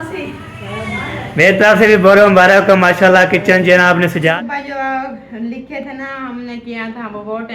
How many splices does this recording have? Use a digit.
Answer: 1